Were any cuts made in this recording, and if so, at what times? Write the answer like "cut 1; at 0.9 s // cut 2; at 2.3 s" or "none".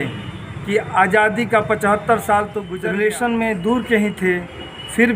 cut 1; at 2.6 s